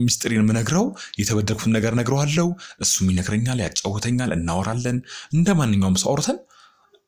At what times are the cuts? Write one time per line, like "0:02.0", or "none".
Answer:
none